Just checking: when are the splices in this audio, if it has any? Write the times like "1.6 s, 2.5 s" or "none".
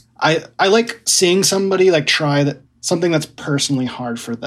2.6 s